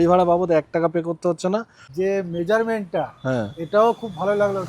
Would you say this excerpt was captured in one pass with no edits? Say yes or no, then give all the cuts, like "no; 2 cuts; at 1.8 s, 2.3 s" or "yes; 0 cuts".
no; 1 cut; at 1.8 s